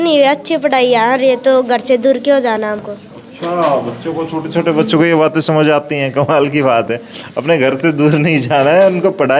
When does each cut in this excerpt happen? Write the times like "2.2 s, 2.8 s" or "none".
none

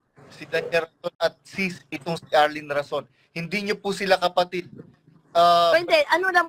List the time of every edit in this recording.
none

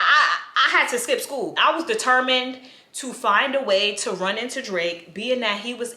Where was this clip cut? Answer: 1.6 s

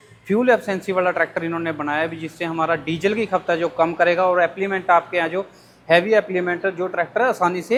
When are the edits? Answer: none

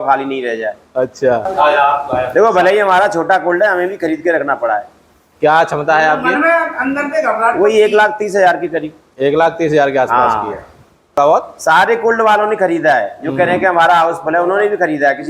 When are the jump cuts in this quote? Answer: 1.4 s, 11.2 s

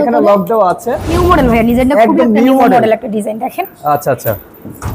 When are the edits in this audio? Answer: 1.2 s

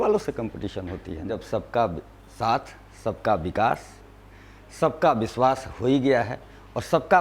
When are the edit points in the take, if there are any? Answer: 1.4 s

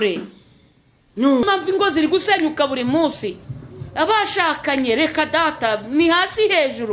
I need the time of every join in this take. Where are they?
1.4 s

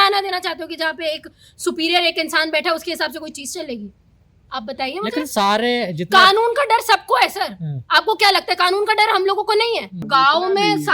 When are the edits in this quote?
10.0 s

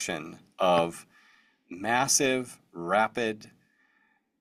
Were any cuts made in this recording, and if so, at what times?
none

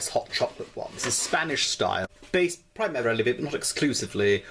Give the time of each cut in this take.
2.0 s

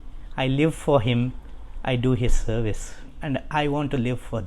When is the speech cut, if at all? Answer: 3.2 s

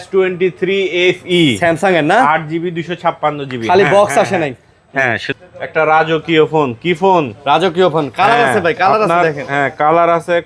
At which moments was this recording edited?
5.2 s

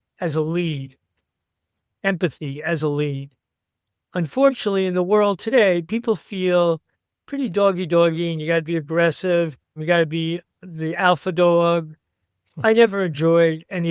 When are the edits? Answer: 9.8 s

